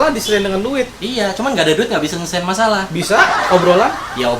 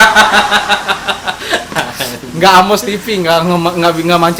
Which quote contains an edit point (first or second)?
first